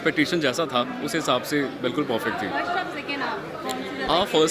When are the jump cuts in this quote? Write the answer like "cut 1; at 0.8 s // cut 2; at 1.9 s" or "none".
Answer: none

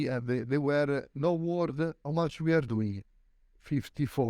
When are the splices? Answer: cut 1; at 1.1 s // cut 2; at 2.0 s

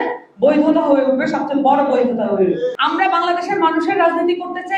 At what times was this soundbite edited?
cut 1; at 2.8 s

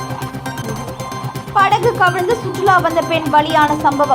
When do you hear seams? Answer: none

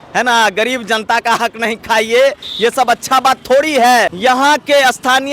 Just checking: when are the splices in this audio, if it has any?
cut 1; at 4.1 s

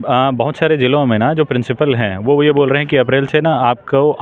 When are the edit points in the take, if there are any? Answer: none

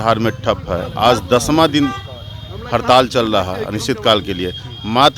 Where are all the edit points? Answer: none

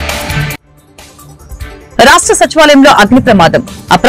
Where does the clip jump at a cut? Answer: cut 1; at 1.9 s

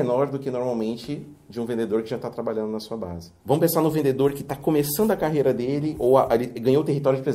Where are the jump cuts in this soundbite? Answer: cut 1; at 3.2 s

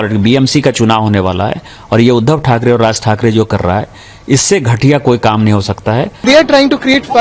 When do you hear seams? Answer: cut 1; at 6.2 s

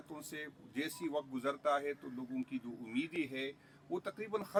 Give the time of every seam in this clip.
none

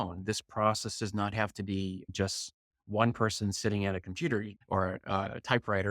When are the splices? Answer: cut 1; at 4.5 s

